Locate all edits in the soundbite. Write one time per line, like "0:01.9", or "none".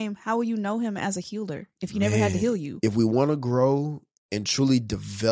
0:02.7